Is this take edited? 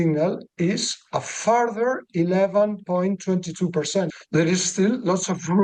yes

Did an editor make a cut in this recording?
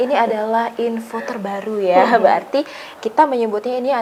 no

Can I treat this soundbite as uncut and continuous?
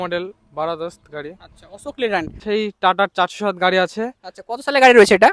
no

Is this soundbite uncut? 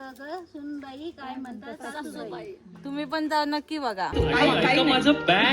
no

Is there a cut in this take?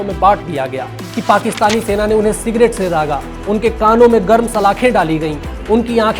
yes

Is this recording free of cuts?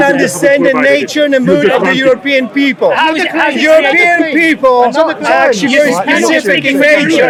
yes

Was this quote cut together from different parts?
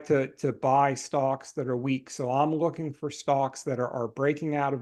no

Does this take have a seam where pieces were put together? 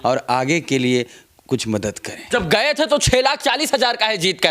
yes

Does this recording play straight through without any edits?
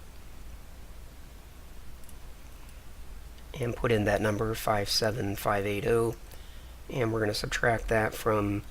no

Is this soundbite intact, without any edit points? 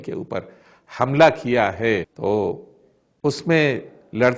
no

